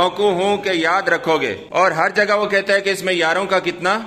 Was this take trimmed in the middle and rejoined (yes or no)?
yes